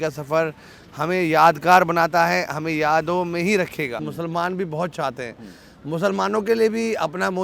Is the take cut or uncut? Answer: cut